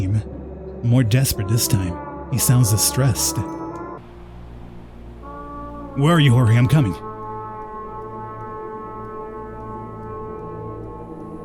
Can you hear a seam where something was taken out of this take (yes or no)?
no